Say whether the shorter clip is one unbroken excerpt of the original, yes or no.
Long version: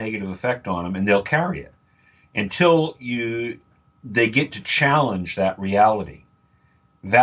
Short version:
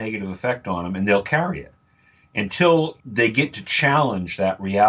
no